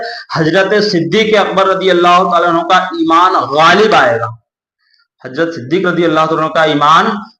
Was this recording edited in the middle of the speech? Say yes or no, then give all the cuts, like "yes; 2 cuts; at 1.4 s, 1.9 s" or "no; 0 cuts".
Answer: no; 0 cuts